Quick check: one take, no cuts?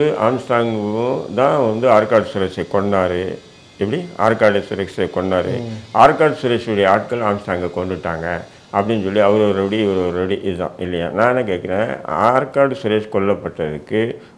yes; 0 cuts

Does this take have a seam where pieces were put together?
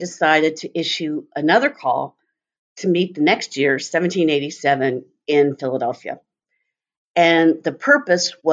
no; 0 cuts

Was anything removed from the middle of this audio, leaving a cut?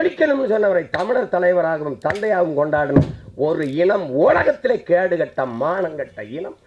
no; 0 cuts

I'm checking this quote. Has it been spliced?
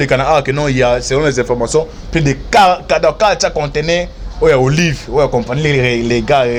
no; 0 cuts

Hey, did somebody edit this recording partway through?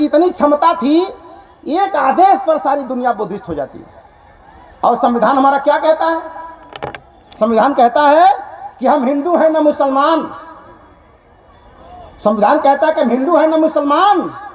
yes; 1 cut; at 4.8 s

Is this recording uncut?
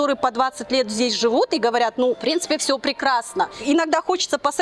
no; 2 cuts; at 2.2 s, 3.6 s

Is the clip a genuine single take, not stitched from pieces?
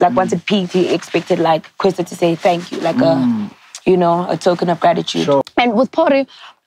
no; 1 cut; at 5.4 s

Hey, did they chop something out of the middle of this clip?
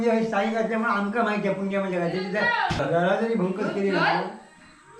no; 0 cuts

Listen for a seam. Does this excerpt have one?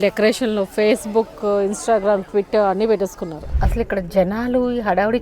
yes; 1 cut; at 3.5 s

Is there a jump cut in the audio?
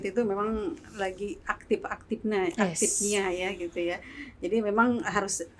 no; 0 cuts

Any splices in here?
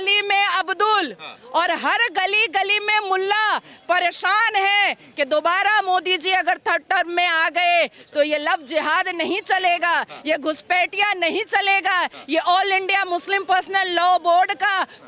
no; 0 cuts

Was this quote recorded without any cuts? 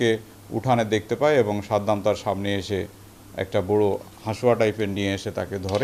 yes; 0 cuts

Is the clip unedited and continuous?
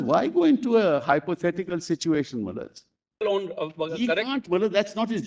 no; 1 cut; at 3.2 s

